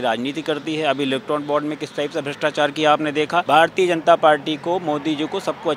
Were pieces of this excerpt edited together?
yes; 1 cut; at 3.4 s

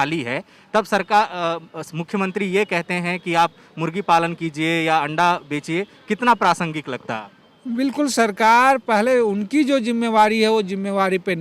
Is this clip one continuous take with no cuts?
yes; 0 cuts

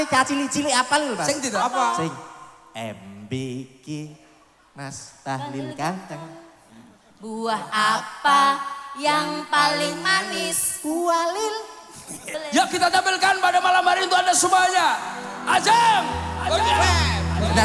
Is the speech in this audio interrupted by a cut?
yes; 1 cut; at 12.3 s

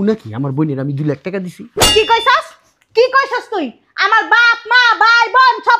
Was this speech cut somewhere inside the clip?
yes; 1 cut; at 1.9 s

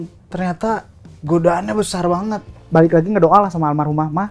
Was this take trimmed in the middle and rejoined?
yes; 1 cut; at 2.5 s

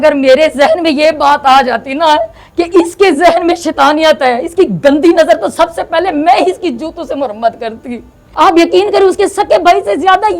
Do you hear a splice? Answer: yes; 1 cut; at 8.2 s

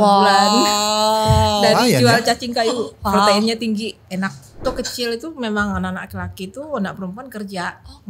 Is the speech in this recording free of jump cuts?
no; 1 cut; at 4.6 s

